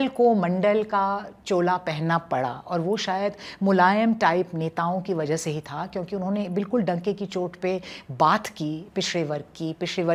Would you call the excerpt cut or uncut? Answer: uncut